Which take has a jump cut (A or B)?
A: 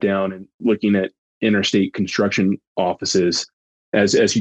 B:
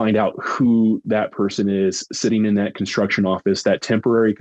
A